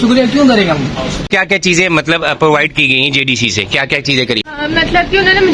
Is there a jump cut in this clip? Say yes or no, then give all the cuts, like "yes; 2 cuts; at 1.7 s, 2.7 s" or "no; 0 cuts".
yes; 2 cuts; at 1.2 s, 4.4 s